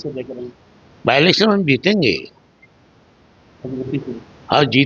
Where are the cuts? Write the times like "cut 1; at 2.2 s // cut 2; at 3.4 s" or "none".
none